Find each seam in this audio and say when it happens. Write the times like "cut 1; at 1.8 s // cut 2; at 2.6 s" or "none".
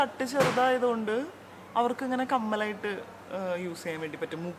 none